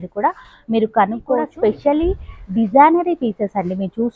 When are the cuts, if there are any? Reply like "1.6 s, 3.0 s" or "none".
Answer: 1.5 s